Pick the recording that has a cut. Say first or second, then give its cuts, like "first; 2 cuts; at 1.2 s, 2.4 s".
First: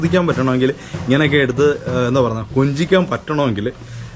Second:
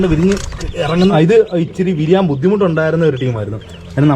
second; 1 cut; at 1.1 s